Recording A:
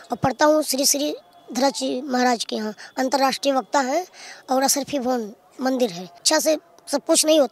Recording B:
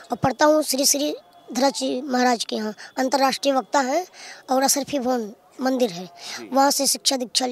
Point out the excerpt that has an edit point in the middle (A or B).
A